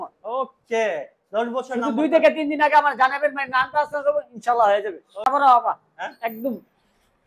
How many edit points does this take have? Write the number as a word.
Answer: one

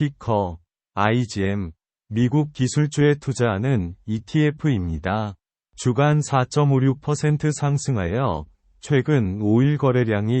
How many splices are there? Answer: one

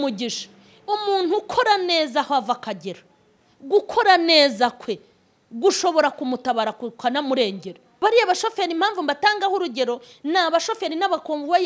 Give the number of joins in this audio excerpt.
one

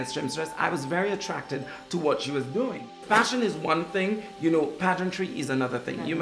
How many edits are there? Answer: one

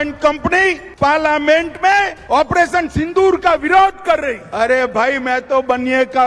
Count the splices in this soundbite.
three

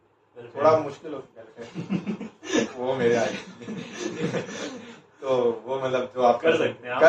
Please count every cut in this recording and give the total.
zero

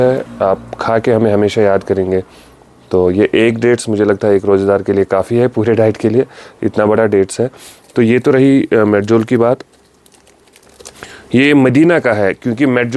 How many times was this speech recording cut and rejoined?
zero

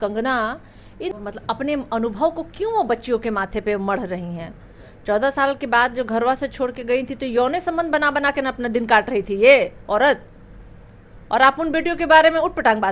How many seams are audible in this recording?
one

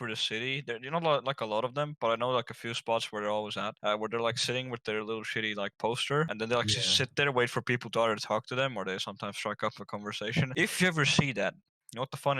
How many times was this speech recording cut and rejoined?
three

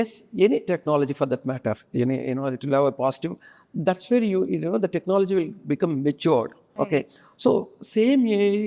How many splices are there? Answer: zero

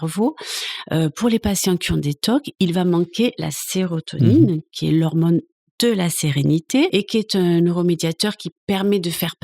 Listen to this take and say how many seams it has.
one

